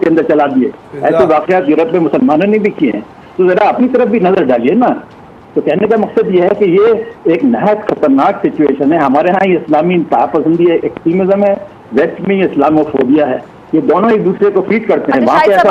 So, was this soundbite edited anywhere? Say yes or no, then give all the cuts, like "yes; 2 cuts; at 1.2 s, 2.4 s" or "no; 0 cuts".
no; 0 cuts